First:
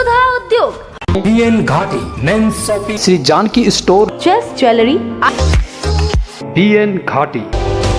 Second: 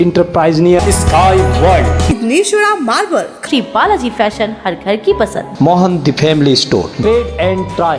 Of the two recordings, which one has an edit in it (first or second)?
first